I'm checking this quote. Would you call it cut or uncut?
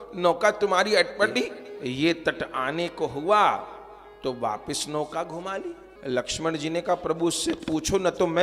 cut